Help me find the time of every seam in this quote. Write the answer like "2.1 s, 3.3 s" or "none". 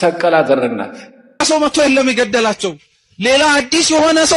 1.4 s